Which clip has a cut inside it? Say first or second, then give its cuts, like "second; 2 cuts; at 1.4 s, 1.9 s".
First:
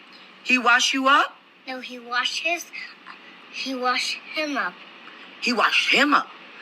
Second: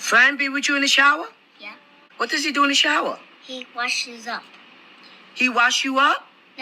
second; 1 cut; at 2.1 s